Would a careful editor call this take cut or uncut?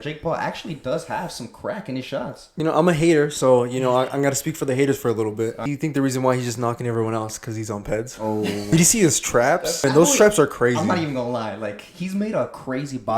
cut